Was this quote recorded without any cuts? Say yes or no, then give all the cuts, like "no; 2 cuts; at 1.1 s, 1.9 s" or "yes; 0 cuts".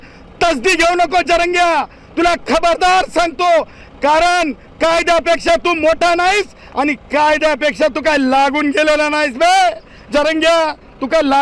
yes; 0 cuts